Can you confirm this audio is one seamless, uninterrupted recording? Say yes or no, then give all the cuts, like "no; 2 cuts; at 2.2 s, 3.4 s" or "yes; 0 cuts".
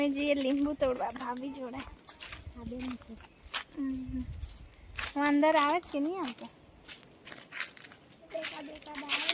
yes; 0 cuts